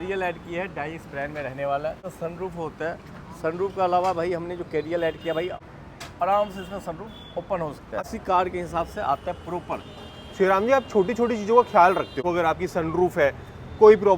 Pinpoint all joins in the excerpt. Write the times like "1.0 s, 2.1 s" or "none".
2.1 s, 5.7 s, 8.0 s, 12.2 s